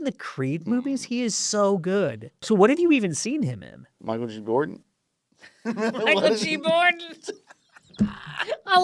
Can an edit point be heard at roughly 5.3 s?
no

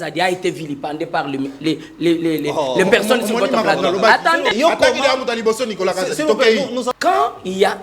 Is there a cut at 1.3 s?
no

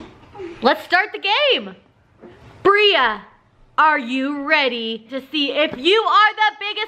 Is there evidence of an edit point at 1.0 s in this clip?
no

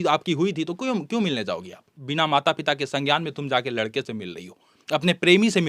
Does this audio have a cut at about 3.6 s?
no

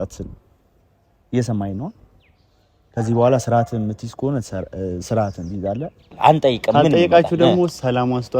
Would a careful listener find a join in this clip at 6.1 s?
yes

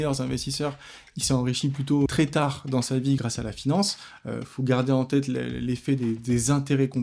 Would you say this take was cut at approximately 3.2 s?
yes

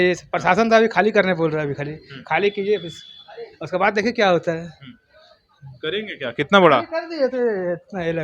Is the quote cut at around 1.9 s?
no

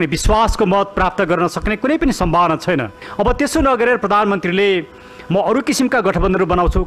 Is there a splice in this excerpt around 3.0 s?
yes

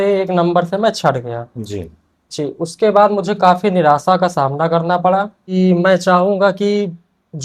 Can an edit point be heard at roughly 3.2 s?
no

